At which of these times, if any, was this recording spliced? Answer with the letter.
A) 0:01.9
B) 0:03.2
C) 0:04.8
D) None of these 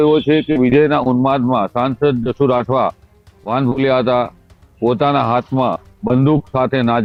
D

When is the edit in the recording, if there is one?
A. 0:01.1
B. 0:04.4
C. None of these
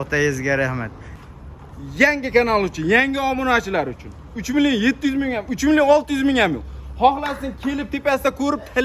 A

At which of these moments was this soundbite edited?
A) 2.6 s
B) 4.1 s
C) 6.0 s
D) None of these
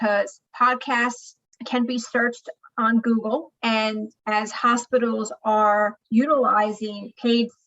C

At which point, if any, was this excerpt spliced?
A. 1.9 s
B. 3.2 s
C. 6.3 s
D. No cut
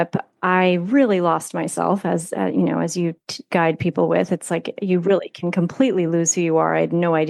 D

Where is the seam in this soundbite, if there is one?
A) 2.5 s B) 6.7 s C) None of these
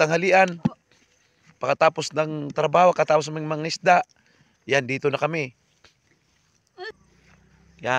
B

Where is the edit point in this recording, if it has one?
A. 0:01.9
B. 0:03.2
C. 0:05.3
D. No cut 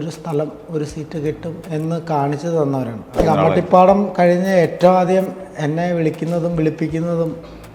B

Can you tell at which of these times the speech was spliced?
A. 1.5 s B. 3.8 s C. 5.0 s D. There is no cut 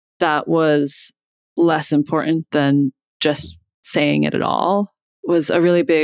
C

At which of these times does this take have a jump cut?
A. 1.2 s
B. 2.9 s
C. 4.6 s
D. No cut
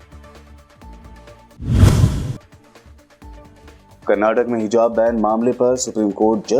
A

